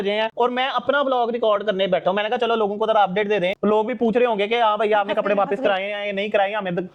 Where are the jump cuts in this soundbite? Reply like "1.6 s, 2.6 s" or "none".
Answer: none